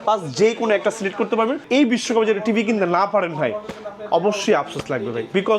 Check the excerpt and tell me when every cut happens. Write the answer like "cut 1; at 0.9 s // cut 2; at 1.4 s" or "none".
cut 1; at 1.6 s